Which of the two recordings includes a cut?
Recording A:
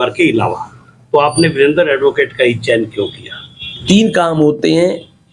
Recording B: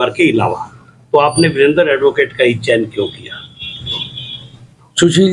A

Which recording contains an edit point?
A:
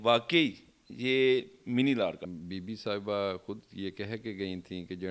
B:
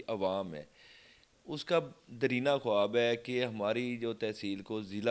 A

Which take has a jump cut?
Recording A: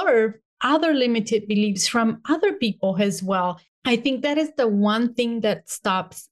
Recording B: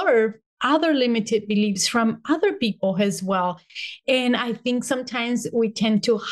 A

